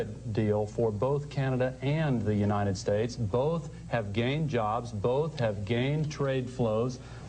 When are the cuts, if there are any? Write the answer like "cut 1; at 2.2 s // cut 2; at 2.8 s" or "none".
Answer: none